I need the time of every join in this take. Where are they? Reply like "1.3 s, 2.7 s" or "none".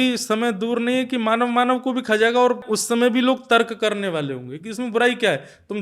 2.7 s